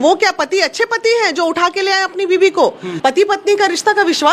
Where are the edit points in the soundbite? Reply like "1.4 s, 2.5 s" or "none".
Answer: 2.9 s